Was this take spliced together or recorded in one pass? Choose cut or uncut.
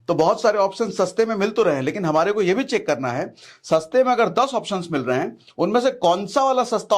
uncut